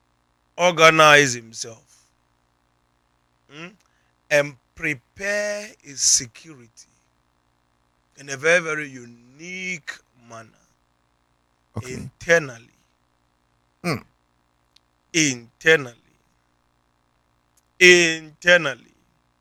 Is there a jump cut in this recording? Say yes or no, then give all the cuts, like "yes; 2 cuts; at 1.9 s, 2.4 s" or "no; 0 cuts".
no; 0 cuts